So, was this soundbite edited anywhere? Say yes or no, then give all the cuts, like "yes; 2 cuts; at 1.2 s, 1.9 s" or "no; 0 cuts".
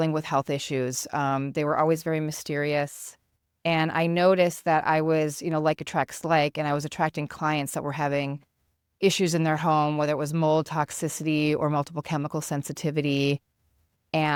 no; 0 cuts